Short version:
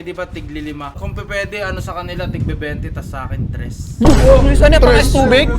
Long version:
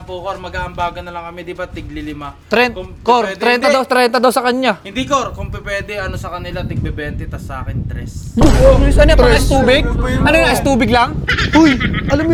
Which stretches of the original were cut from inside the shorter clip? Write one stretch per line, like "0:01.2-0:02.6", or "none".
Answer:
0:02.4-0:05.3